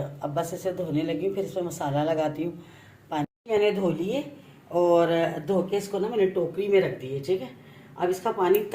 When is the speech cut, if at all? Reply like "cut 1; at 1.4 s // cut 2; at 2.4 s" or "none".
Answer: cut 1; at 3.2 s